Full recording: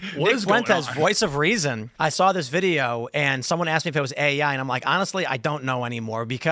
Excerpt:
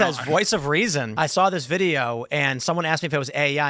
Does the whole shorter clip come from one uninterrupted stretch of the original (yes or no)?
no